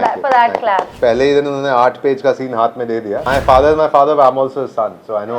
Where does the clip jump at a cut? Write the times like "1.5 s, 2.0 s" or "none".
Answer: 0.9 s, 3.2 s